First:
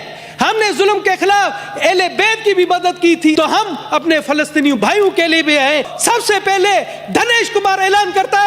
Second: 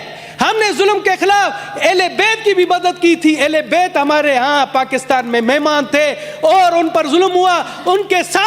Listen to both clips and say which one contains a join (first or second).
first